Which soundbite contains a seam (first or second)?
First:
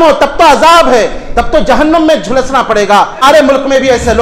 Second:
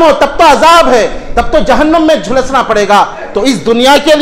first